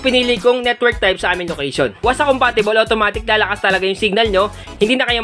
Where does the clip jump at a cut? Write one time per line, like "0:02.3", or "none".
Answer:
0:02.0

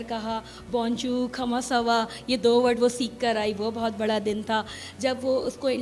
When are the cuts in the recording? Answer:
none

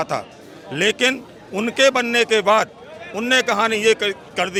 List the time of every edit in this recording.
none

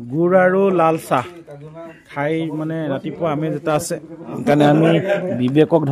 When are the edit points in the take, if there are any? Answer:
none

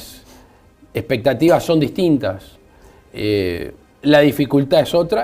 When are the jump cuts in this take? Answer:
0:04.0

